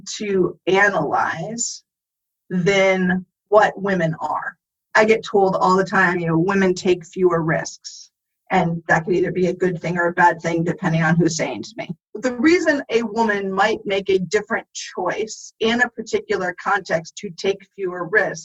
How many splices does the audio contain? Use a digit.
1